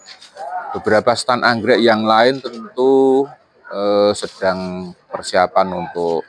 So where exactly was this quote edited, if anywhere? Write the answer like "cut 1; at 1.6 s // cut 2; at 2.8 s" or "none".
none